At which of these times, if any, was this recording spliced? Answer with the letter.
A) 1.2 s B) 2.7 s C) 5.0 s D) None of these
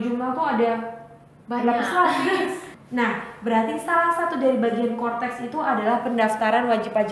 B